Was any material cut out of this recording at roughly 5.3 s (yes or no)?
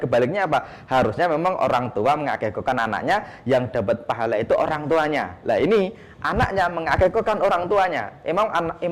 no